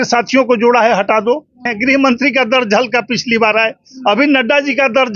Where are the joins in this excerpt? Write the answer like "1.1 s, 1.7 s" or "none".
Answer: 1.7 s